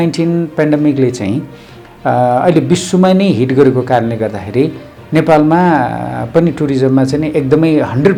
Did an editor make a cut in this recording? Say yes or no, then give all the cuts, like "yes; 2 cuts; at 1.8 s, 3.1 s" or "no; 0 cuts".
no; 0 cuts